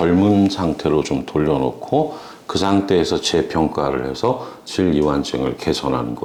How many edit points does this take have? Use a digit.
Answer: 0